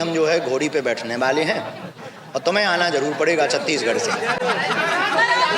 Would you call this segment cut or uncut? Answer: uncut